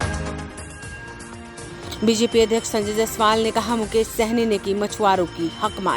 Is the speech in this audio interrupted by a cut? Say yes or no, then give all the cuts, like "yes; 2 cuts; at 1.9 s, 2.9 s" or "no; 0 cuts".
yes; 1 cut; at 1.5 s